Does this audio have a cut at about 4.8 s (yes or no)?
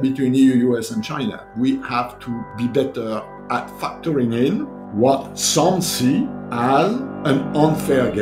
yes